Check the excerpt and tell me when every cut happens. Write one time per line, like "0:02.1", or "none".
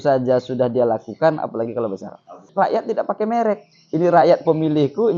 0:02.5